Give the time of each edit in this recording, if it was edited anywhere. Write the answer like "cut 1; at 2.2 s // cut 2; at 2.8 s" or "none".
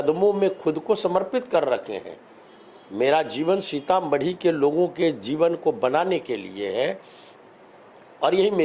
none